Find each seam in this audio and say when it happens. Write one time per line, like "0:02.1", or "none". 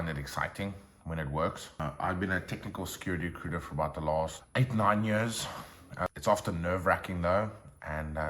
0:01.8
0:04.4
0:06.1